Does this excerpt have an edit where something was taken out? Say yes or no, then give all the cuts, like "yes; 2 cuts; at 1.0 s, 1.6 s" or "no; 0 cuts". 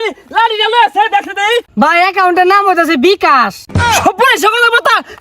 yes; 2 cuts; at 1.7 s, 3.9 s